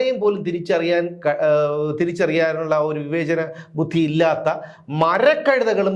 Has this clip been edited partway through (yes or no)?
no